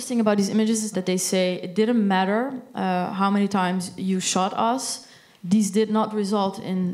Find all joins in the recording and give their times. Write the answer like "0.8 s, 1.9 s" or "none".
0.9 s

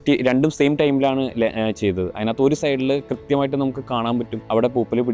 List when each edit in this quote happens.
none

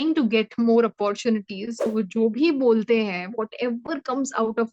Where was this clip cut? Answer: 1.9 s

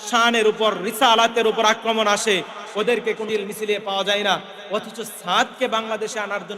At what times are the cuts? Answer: 3.3 s

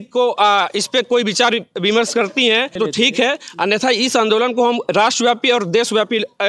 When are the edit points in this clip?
2.8 s

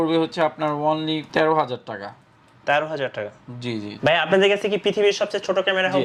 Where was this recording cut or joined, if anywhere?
none

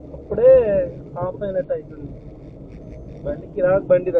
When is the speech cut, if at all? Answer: none

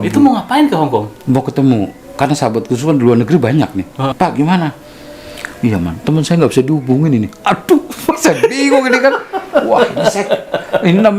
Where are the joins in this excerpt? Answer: 4.1 s

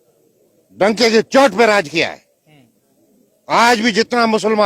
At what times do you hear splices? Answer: none

